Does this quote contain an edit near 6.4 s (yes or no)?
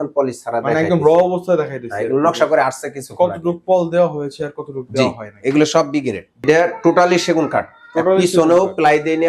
yes